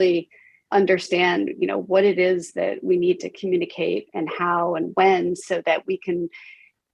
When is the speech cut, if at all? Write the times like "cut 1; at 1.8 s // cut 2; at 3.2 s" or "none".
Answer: none